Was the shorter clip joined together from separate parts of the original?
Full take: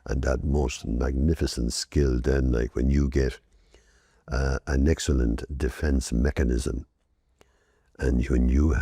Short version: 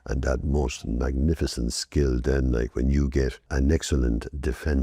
yes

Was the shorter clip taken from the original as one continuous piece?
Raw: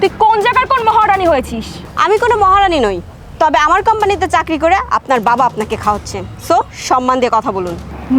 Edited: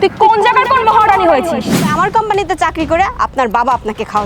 no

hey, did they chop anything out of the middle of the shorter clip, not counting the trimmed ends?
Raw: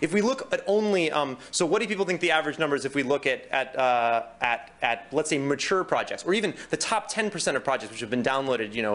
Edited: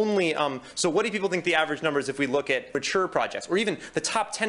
yes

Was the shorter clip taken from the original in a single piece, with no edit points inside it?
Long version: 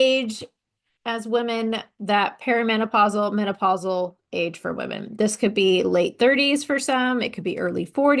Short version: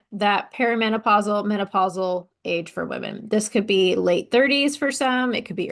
yes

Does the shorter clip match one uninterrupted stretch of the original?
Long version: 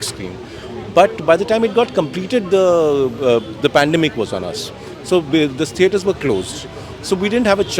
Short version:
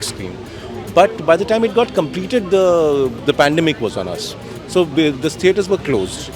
no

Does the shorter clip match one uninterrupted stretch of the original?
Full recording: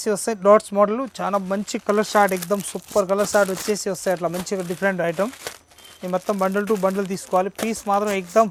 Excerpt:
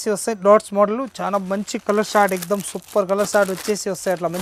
yes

